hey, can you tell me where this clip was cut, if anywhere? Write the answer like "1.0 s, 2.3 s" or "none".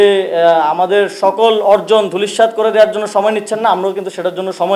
none

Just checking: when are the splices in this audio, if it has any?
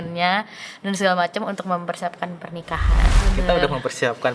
3.1 s

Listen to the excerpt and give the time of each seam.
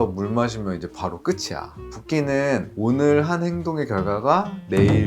1.8 s

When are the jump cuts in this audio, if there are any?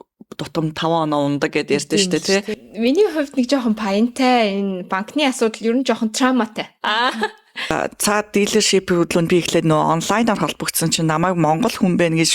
2.5 s, 7.7 s

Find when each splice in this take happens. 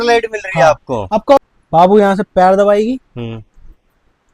1.4 s

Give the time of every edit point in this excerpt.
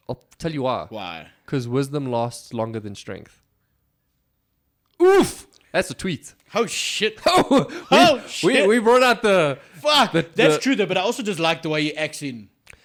none

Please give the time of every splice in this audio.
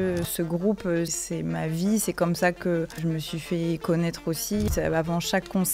1.2 s, 3.0 s, 4.7 s

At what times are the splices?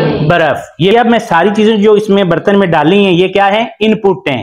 0.9 s

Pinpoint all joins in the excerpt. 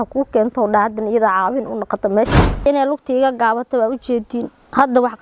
2.7 s

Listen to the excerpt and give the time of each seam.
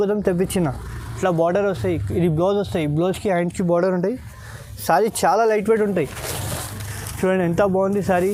none

